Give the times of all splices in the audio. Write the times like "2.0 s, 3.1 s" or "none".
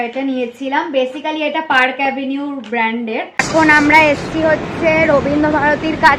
3.5 s